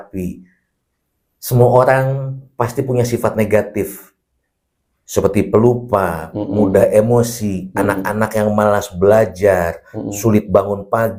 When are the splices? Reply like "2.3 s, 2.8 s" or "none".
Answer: none